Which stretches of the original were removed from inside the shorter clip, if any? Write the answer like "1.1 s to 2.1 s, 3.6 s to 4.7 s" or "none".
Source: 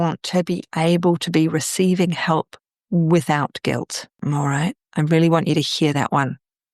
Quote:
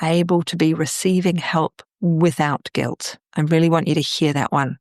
2.6 s to 2.7 s, 4.1 s to 4.8 s